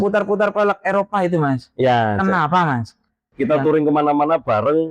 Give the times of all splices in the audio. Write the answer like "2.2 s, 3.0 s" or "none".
3.3 s